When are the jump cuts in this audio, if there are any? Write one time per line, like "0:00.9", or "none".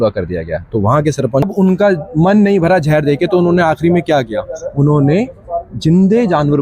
0:01.5